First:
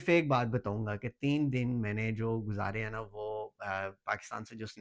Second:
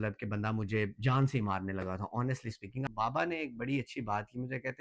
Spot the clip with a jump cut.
second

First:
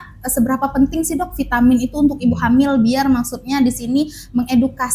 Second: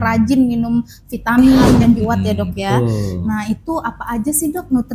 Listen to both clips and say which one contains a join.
second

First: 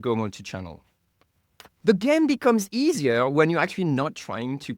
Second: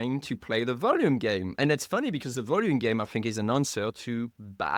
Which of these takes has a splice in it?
first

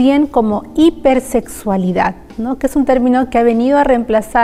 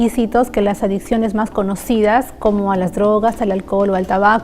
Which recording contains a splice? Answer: second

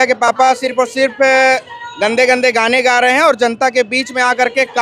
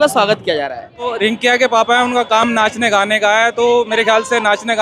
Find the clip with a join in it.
second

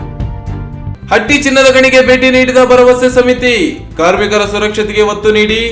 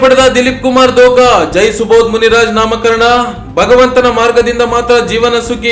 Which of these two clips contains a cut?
first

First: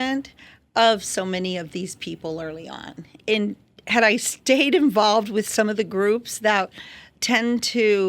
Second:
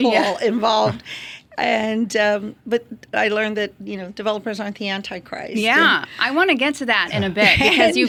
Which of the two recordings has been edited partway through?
first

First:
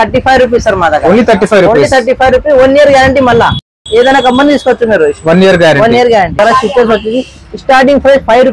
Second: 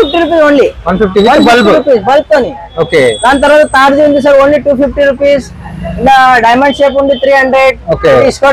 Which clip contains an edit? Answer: first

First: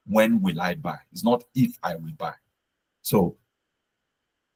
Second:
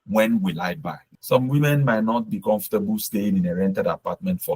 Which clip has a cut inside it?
second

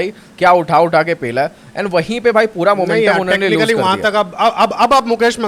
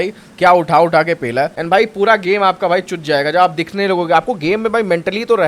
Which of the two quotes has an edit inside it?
second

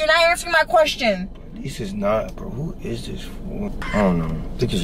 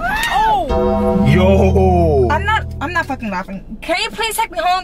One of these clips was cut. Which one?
first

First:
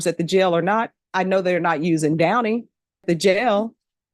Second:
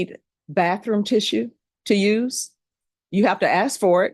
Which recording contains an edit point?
first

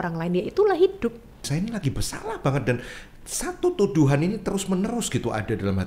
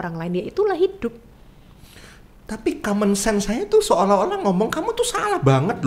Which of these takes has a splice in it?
first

